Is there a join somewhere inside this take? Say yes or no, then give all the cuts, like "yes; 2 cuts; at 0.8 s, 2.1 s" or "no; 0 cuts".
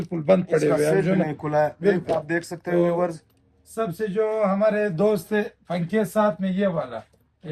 no; 0 cuts